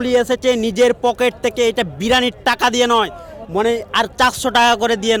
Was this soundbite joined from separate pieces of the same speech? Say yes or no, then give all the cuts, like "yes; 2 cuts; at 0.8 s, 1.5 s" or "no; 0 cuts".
no; 0 cuts